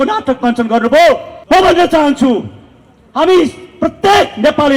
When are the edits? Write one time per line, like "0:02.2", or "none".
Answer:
0:01.3